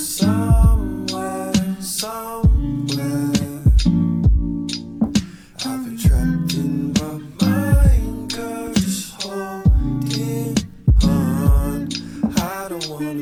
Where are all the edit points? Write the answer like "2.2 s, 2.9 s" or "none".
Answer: none